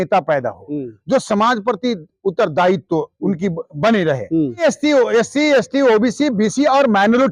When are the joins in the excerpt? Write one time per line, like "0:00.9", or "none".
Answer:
0:04.6